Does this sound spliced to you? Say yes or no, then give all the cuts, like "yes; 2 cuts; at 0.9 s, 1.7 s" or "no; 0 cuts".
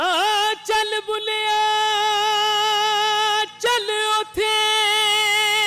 no; 0 cuts